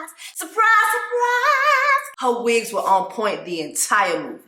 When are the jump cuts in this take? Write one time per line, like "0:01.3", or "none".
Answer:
0:02.1